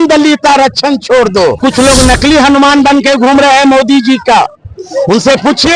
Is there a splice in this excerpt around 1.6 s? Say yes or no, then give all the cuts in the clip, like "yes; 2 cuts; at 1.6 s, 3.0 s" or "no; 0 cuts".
yes; 1 cut; at 1.6 s